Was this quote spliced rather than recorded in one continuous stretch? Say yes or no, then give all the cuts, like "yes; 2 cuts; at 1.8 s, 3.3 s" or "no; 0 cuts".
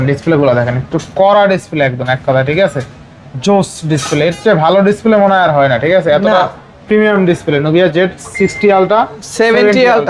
no; 0 cuts